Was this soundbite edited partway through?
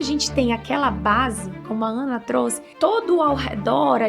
yes; 1 cut; at 2.6 s

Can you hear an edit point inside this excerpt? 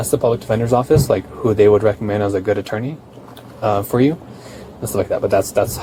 no; 0 cuts

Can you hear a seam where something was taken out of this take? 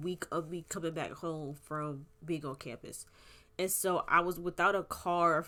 no; 0 cuts

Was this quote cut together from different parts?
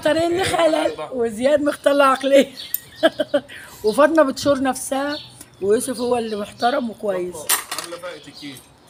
no; 0 cuts

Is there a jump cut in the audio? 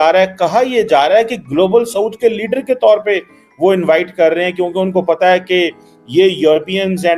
no; 0 cuts

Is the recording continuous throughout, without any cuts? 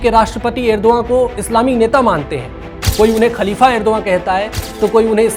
yes; 0 cuts

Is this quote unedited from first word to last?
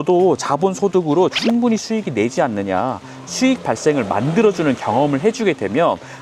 yes; 0 cuts

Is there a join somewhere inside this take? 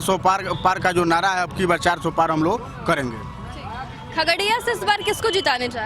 no; 0 cuts

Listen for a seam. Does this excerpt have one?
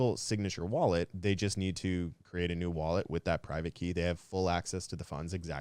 yes; 2 cuts; at 1.1 s, 2.2 s

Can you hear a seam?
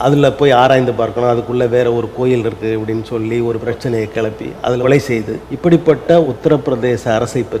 yes; 4 cuts; at 3.6 s, 4.8 s, 5.4 s, 6.3 s

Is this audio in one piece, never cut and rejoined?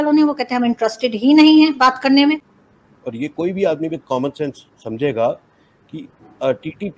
no; 1 cut; at 2.4 s

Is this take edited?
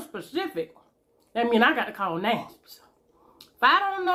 no; 0 cuts

